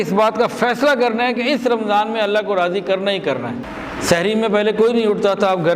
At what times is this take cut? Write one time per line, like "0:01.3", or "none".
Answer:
0:03.7